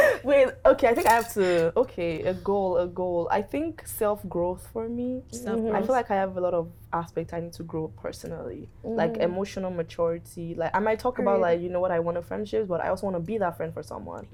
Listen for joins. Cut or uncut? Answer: uncut